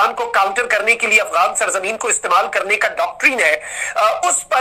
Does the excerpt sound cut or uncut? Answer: uncut